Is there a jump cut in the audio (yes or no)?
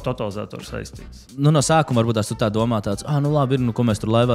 yes